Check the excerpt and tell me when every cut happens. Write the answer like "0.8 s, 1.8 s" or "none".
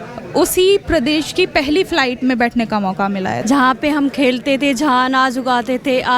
3.4 s